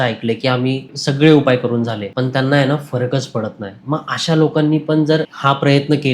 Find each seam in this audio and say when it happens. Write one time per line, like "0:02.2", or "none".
0:00.9
0:02.0
0:05.3